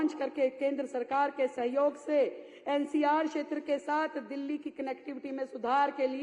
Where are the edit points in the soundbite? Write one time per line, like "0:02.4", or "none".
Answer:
none